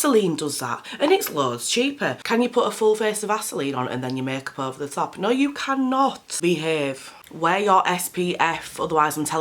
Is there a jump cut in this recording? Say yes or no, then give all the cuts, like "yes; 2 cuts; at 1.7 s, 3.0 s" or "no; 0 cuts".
yes; 2 cuts; at 2.2 s, 6.3 s